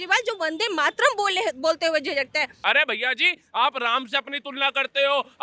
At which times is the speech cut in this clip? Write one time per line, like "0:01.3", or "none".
0:02.5